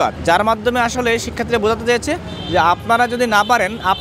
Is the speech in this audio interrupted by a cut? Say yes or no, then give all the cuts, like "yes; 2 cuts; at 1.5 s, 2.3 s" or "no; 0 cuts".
no; 0 cuts